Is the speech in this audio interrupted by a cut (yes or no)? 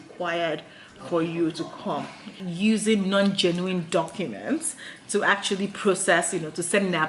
yes